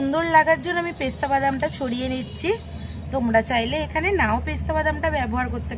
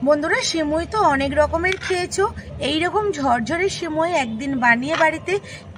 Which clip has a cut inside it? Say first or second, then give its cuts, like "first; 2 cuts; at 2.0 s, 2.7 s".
second; 1 cut; at 2.5 s